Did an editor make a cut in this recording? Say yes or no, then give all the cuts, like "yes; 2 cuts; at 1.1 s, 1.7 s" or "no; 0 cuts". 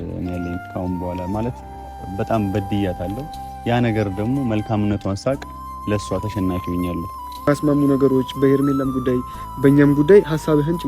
yes; 1 cut; at 7.5 s